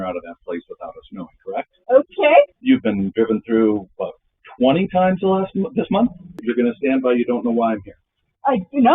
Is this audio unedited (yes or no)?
no